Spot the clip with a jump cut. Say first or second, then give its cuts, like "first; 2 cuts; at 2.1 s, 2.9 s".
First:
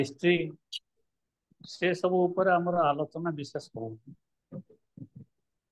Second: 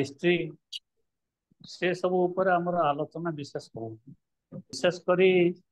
second; 1 cut; at 4.8 s